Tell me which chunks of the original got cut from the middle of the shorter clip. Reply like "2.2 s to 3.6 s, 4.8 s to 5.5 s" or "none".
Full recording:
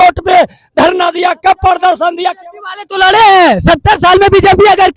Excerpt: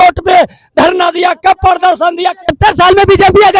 2.5 s to 3.8 s

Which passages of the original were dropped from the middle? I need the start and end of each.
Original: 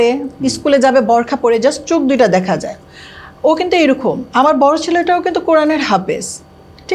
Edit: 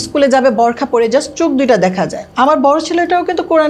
2.8 s to 4.2 s

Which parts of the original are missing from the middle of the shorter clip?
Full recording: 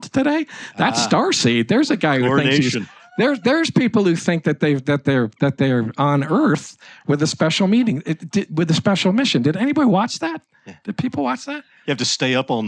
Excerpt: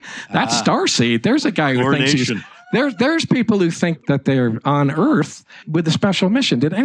4.4 s to 5.3 s, 7.0 s to 8.5 s

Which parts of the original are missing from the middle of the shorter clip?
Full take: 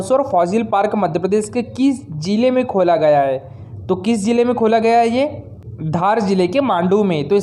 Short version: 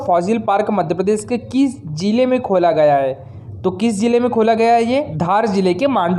5.4 s to 5.9 s

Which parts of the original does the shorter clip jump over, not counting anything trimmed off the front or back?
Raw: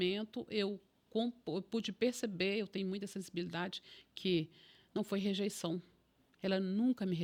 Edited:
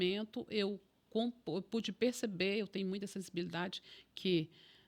none

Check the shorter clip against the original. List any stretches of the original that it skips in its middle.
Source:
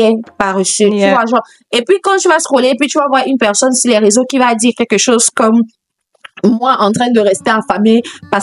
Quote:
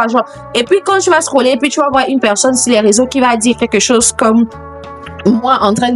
none

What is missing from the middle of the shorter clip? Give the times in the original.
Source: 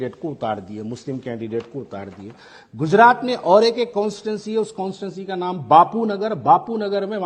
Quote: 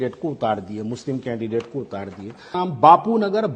2.5 s to 5.4 s

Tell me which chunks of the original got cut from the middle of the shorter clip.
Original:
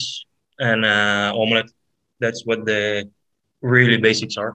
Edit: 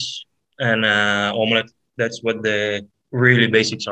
1.8 s to 2.0 s, 3.2 s to 3.5 s

